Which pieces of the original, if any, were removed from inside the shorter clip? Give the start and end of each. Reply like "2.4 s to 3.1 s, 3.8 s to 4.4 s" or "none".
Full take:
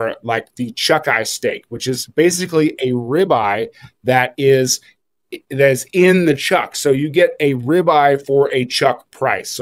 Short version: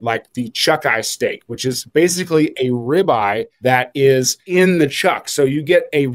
3.7 s to 3.9 s, 4.8 s to 5.9 s